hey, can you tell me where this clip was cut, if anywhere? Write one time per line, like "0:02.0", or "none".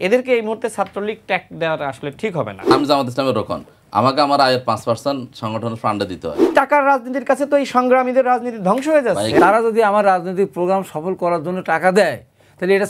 0:02.7
0:06.5
0:09.3